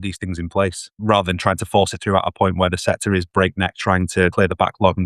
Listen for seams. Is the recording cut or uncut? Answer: cut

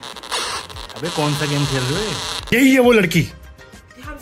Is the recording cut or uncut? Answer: cut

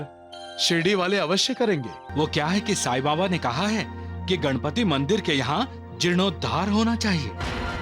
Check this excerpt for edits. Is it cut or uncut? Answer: cut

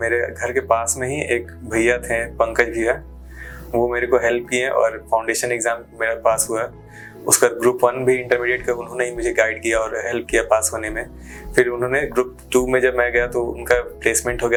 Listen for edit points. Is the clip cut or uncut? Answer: uncut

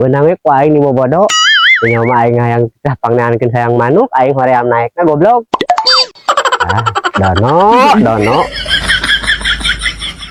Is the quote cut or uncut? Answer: uncut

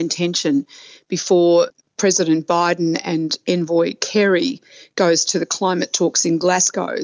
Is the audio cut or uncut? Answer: uncut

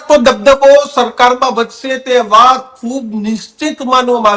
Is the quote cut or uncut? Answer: uncut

